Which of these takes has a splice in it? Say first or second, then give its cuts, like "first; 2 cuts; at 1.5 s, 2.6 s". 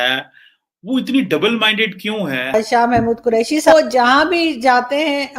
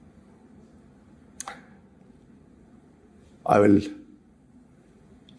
first; 2 cuts; at 2.5 s, 3.7 s